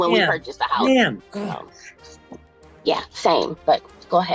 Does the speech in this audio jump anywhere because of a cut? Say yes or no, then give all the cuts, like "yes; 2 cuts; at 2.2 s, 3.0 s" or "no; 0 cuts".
yes; 2 cuts; at 1.3 s, 3.6 s